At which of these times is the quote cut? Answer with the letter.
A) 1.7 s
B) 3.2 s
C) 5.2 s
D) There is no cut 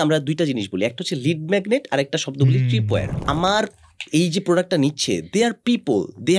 B